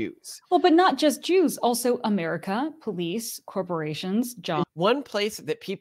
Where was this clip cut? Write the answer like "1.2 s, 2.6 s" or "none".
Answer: 4.6 s